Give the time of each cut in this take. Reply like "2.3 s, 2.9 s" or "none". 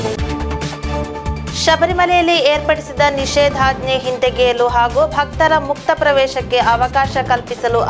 none

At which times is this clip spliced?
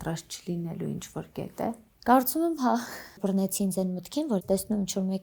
1.9 s, 3.2 s, 4.4 s

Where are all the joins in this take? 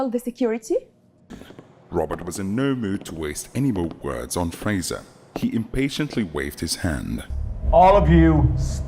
1.3 s, 7.3 s

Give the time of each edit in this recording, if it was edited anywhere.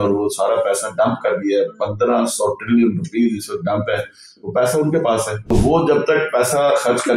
5.4 s

